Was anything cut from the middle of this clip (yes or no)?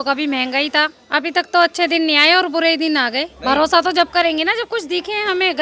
yes